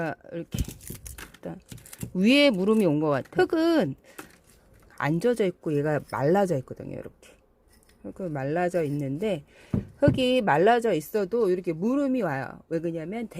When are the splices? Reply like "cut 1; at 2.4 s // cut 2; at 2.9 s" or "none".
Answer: cut 1; at 3.3 s